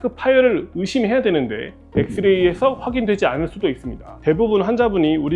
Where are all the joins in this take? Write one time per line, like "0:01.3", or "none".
0:04.1

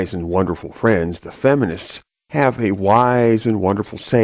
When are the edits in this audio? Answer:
0:01.5

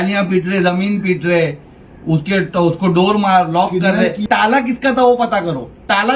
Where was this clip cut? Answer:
0:04.2

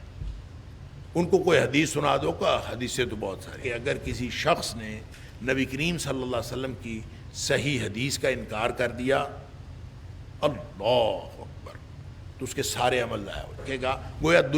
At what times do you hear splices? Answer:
0:03.6
0:13.7

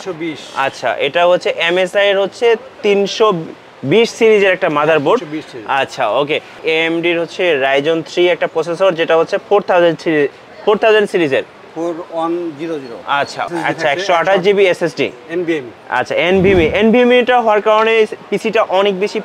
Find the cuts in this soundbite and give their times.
0:06.6
0:13.5

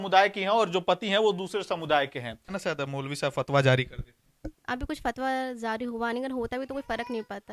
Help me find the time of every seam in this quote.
0:02.6

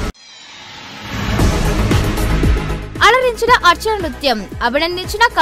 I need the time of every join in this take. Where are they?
none

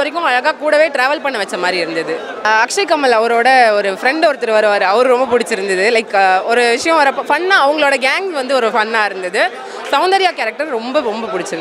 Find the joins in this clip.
none

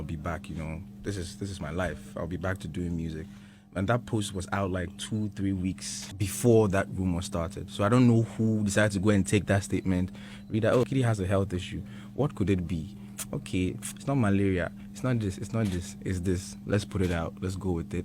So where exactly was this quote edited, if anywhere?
0:06.0
0:10.9

